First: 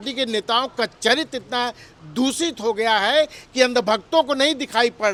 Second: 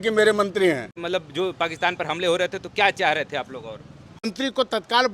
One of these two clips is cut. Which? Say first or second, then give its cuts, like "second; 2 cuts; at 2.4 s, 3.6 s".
second; 2 cuts; at 1.0 s, 4.3 s